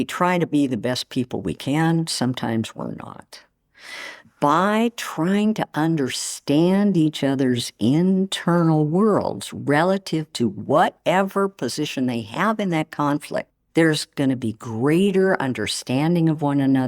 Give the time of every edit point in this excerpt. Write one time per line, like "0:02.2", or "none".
0:03.8